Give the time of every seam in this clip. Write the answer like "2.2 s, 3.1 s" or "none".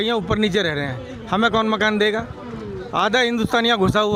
none